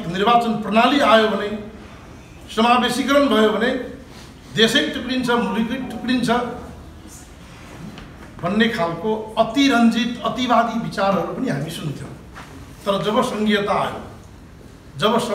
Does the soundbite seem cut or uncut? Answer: uncut